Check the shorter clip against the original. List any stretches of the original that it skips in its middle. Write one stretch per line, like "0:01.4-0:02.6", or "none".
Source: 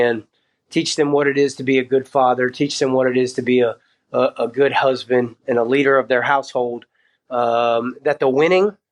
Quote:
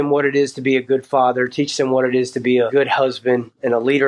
0:03.7-0:04.5